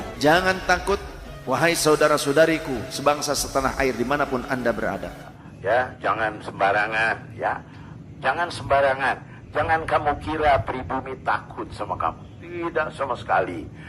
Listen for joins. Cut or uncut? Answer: cut